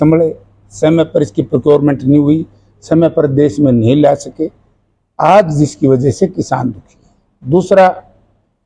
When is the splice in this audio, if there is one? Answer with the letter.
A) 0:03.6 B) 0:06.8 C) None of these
C